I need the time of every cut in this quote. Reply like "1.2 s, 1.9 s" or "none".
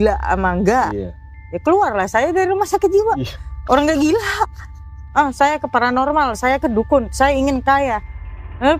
5.0 s